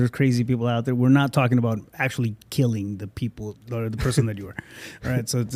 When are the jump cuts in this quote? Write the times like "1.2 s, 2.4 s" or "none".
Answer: none